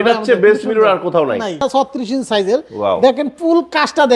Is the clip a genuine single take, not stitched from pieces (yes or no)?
no